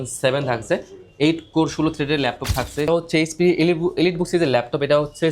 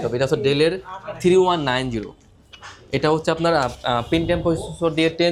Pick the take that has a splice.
first; 1 cut; at 2.9 s

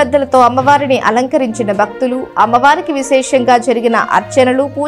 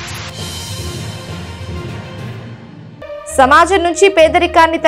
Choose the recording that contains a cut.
second; 1 cut; at 3.0 s

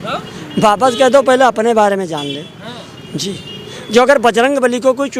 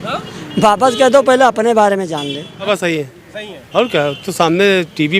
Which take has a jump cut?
second; 1 cut; at 2.7 s

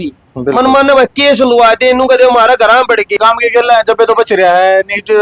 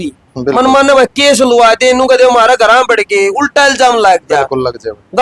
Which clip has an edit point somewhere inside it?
first; 1 cut; at 3.2 s

